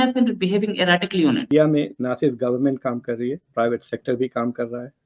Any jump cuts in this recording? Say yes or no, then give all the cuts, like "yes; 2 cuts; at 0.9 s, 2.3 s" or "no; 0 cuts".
yes; 1 cut; at 1.5 s